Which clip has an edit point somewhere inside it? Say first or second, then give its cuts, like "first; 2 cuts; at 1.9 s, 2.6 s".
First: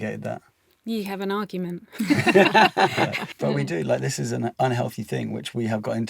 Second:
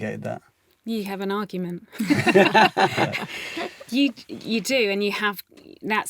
first; 1 cut; at 3.3 s